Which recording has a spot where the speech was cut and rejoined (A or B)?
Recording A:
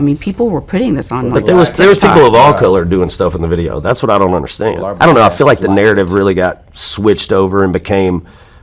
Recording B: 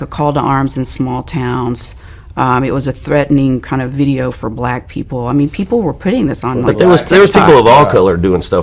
A